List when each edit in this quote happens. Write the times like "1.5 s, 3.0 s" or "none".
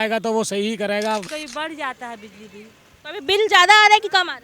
1.2 s